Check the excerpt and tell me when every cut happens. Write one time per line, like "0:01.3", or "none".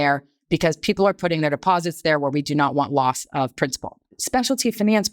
0:04.1

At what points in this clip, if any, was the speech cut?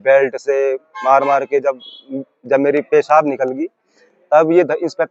none

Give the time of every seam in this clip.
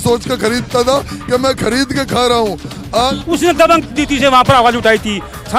0:03.2

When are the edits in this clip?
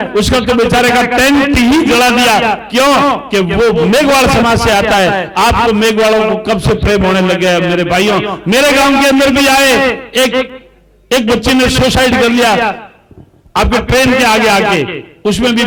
none

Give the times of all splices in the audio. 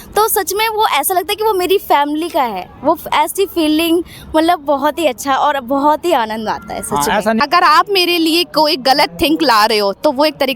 0:07.4

